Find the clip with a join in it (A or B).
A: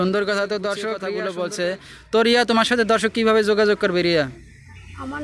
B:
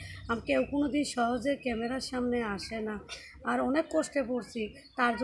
A